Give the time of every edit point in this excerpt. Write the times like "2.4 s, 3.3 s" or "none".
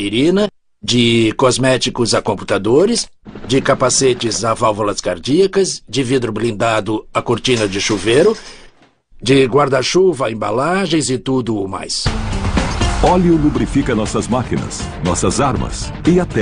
14.2 s